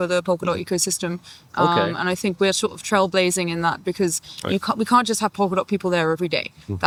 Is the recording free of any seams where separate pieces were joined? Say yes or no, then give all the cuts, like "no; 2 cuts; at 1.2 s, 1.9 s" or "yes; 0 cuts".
yes; 0 cuts